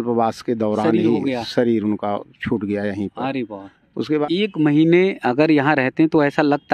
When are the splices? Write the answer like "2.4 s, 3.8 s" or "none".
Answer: 4.2 s